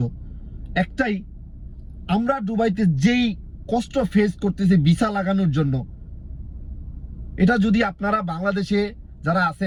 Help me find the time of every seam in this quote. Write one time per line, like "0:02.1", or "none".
none